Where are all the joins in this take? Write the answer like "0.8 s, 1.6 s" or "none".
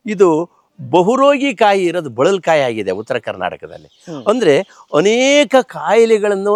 none